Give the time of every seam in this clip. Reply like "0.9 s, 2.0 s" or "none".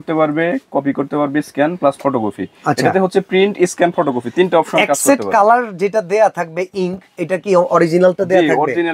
none